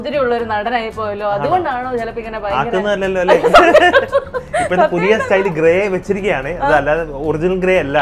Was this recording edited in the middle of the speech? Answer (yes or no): no